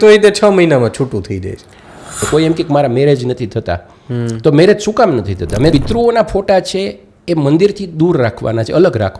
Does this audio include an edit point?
yes; 2 cuts; at 2.2 s, 5.7 s

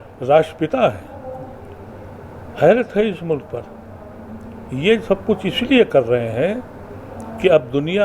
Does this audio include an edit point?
no; 0 cuts

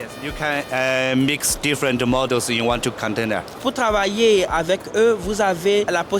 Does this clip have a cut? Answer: yes; 1 cut; at 3.6 s

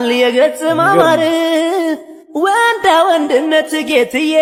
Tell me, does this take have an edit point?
no; 0 cuts

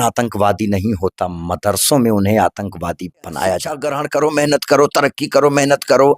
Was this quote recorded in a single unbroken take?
no; 1 cut; at 3.9 s

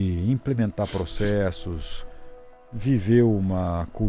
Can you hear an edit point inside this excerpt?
no; 0 cuts

